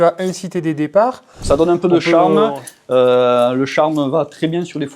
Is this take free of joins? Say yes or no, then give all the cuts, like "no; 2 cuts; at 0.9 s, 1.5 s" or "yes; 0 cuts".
no; 1 cut; at 1.4 s